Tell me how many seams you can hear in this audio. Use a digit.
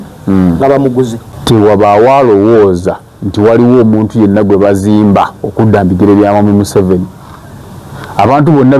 1